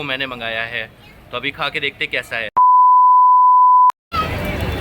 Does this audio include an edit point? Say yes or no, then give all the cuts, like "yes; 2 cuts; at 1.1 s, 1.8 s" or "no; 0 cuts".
no; 0 cuts